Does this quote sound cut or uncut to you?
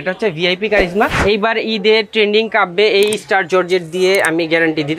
cut